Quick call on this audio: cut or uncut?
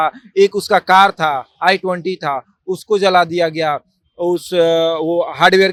uncut